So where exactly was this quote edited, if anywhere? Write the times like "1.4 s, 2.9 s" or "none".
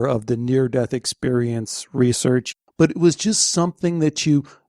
2.5 s

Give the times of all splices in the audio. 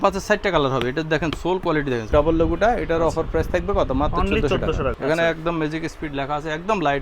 2.1 s, 5.0 s

